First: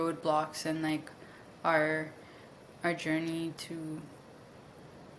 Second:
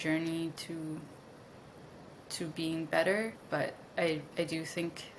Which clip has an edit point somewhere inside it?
second; 1 cut; at 3.4 s

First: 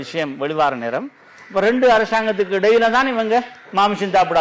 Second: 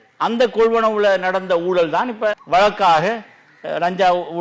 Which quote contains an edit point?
second; 1 cut; at 2.4 s

